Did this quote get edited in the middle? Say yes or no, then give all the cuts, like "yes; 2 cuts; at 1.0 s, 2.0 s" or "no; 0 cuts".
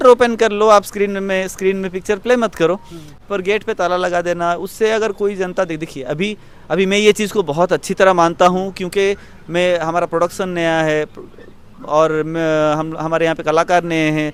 no; 0 cuts